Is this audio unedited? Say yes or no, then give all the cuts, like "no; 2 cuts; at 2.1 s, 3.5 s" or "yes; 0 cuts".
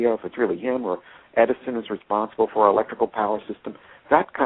no; 1 cut; at 2.3 s